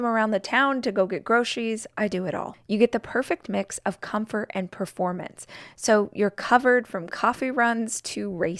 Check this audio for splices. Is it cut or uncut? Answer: uncut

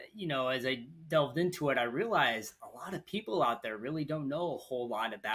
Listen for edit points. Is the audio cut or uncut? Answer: uncut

